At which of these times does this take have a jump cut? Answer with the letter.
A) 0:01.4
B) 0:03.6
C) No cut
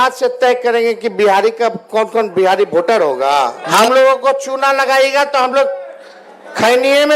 B